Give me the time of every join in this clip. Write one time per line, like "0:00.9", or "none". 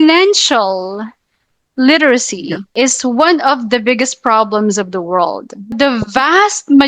0:02.7
0:05.7